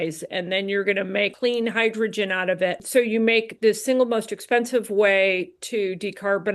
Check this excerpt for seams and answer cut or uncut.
cut